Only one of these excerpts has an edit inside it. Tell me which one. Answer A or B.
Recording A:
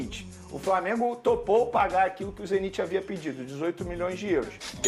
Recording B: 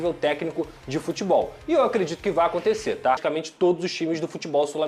B